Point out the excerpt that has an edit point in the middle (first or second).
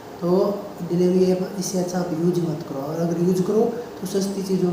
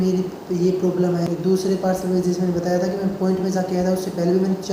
second